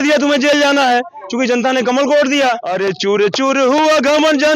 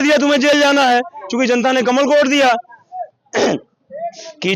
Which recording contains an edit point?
first; 1 cut; at 2.7 s

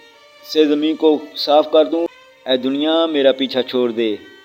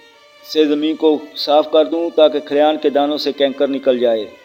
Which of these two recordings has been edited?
first; 1 cut; at 2.0 s

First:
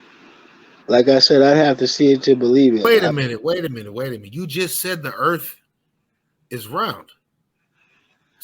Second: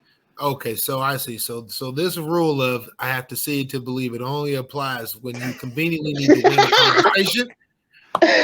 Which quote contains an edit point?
first; 1 cut; at 2.9 s

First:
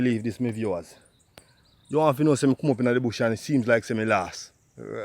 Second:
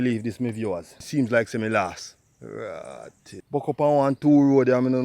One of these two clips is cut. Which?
second; 2 cuts; at 1.0 s, 3.4 s

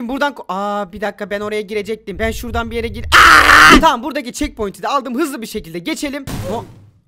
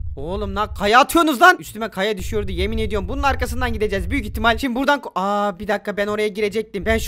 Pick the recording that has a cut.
first; 1 cut; at 3.8 s

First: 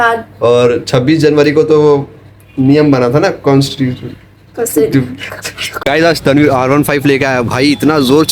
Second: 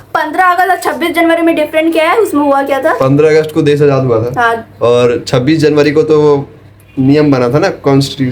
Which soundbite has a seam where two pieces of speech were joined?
first; 1 cut; at 5.7 s

